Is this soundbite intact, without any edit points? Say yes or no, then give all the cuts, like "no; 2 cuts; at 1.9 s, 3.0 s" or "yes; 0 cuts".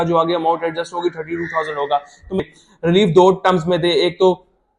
no; 1 cut; at 2.4 s